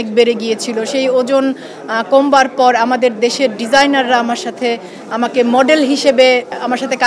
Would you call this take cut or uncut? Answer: uncut